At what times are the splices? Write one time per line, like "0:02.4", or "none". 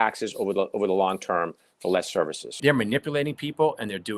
0:02.6